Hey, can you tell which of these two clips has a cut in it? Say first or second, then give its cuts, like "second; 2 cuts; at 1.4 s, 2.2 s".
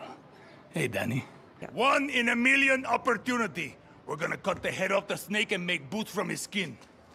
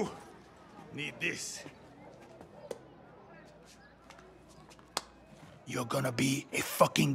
first; 1 cut; at 1.6 s